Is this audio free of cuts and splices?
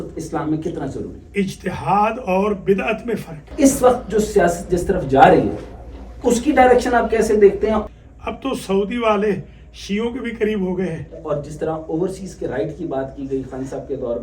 no; 3 cuts; at 3.5 s, 7.8 s, 11.2 s

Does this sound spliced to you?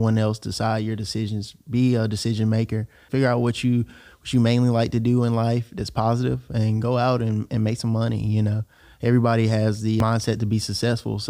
yes; 2 cuts; at 3.0 s, 10.0 s

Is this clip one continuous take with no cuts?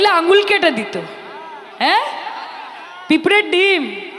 yes; 0 cuts

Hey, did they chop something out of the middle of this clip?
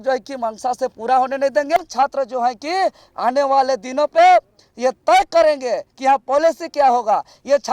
no; 0 cuts

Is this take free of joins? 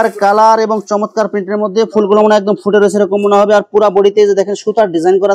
yes; 0 cuts

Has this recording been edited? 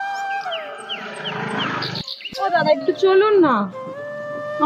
yes; 1 cut; at 2.1 s

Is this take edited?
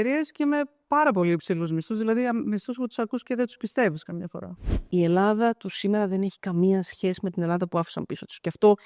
yes; 1 cut; at 4.9 s

